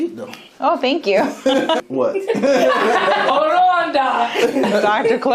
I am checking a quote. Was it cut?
yes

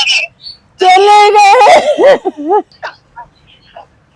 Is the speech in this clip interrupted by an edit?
yes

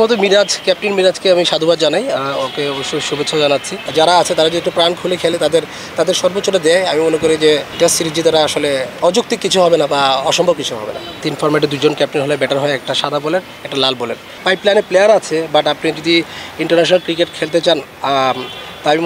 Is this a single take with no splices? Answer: no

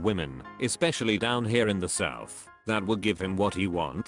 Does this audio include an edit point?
no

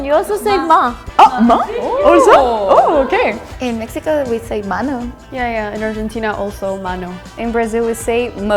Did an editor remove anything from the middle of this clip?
no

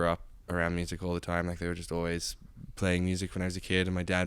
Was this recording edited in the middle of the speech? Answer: no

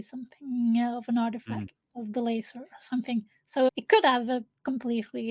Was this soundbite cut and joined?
yes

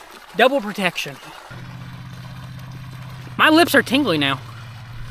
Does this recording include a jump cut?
yes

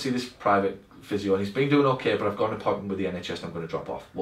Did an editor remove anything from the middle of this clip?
no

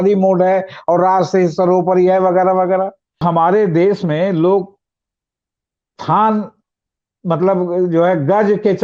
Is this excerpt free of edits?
no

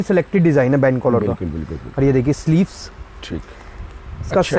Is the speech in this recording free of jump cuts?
yes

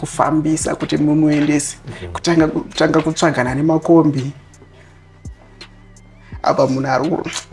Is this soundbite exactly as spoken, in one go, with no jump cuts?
yes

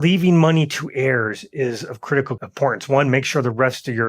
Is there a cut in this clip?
yes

